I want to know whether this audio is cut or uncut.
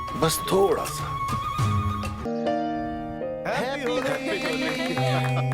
cut